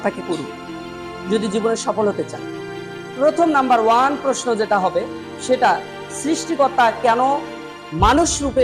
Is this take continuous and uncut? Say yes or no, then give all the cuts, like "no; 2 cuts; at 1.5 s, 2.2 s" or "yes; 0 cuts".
yes; 0 cuts